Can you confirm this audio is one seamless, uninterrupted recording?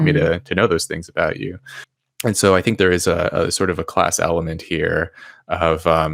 yes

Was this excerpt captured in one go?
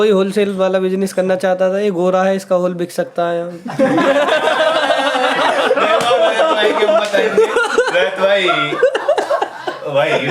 yes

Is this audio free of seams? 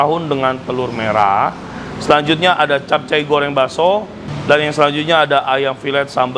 yes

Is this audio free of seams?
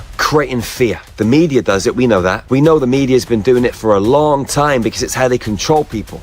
no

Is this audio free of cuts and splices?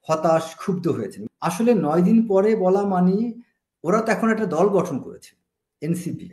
no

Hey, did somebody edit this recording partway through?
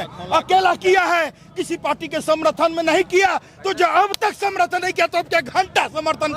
no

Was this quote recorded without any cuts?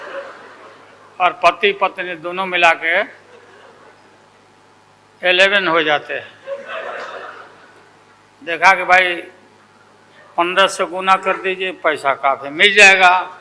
yes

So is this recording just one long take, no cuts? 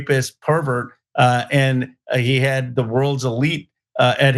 yes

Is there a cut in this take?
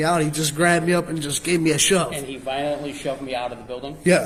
no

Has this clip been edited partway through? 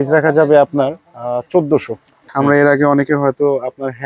yes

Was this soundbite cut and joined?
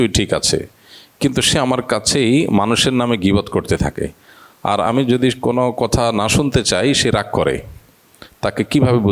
no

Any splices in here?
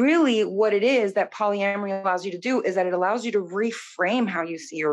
no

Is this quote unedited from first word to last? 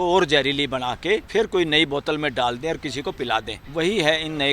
no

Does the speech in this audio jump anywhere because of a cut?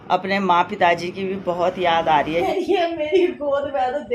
yes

